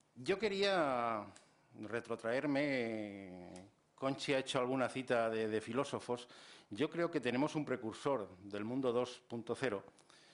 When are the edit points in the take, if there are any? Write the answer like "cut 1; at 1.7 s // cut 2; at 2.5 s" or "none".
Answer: none